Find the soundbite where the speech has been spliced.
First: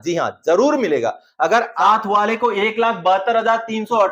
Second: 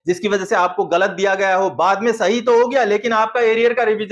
first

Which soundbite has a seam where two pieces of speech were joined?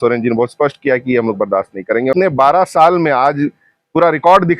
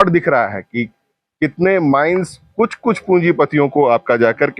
first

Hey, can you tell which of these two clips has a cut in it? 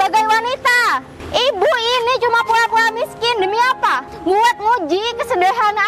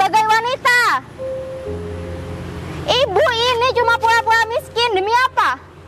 first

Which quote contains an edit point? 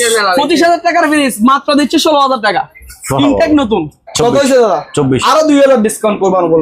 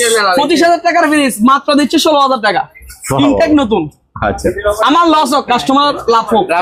first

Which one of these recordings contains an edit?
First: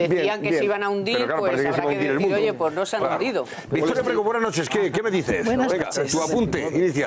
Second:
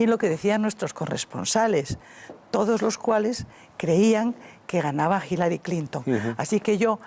second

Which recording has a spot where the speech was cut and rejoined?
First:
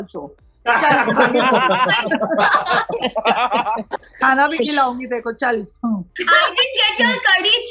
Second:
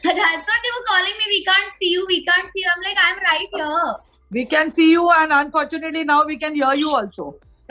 first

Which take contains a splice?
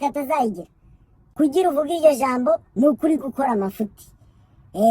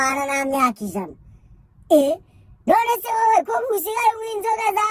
first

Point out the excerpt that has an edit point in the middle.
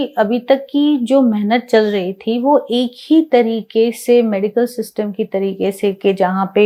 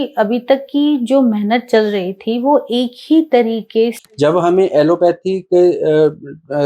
second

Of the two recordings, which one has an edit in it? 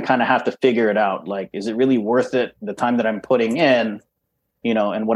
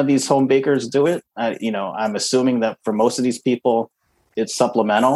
second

